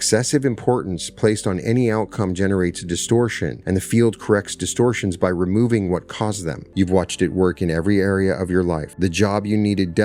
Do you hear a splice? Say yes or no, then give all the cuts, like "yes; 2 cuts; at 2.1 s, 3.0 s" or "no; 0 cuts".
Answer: yes; 3 cuts; at 3.5 s, 6.6 s, 8.9 s